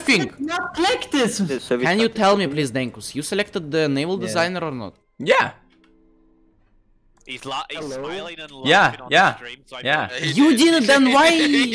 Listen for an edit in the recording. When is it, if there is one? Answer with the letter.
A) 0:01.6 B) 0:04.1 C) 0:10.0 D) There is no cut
A